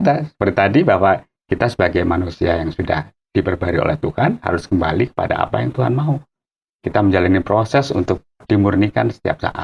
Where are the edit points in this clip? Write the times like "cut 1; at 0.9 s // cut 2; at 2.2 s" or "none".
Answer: none